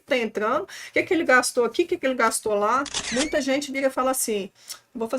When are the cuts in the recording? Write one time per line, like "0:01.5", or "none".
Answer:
0:03.0